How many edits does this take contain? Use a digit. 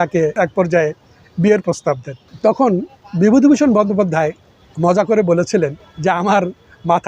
0